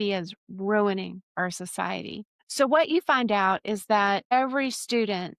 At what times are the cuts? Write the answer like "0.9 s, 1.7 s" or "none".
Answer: 2.4 s, 4.2 s